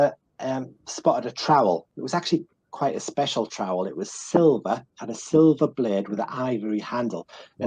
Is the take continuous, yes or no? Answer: no